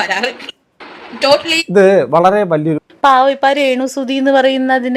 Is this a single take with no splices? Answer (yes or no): no